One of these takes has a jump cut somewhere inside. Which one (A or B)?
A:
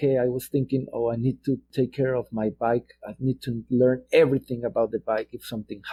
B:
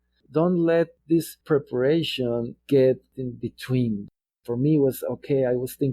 B